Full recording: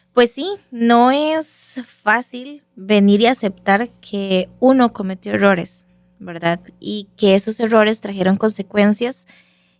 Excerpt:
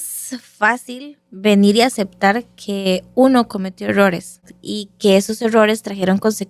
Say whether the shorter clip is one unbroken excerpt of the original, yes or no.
no